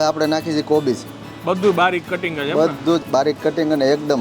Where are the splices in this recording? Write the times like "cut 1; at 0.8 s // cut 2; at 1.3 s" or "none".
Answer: cut 1; at 3.0 s